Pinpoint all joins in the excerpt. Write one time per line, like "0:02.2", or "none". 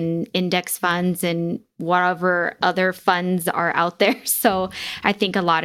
0:01.7